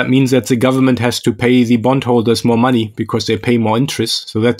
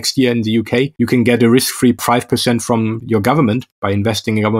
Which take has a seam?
second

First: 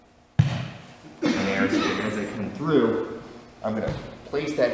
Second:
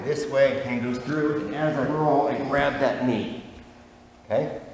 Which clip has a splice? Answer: first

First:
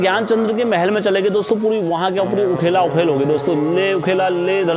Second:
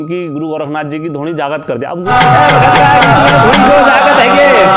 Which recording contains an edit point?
second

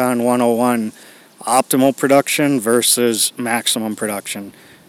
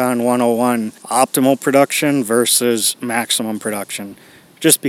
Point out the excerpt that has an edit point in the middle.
second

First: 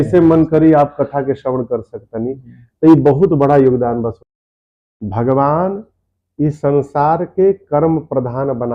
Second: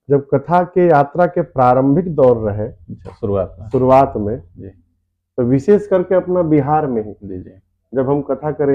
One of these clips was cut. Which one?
first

